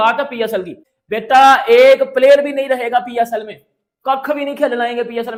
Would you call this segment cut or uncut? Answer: uncut